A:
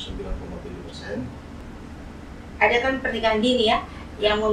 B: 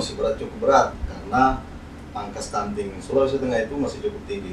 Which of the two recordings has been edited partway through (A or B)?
A